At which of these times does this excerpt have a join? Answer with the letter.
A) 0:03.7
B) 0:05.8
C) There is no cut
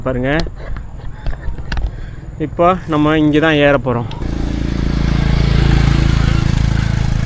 C